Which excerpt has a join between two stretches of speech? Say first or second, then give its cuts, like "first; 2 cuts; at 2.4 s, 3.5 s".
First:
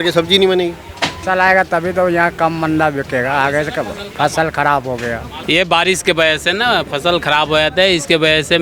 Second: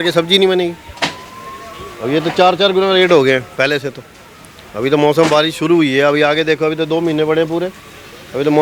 first; 2 cuts; at 1.1 s, 5.4 s